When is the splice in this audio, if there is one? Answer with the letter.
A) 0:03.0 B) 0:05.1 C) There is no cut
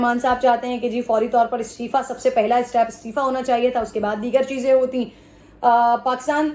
C